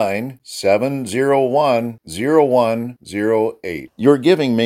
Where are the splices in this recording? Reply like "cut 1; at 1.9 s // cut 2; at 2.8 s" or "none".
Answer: none